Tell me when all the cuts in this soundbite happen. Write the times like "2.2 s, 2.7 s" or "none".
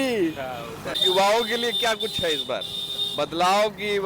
0.9 s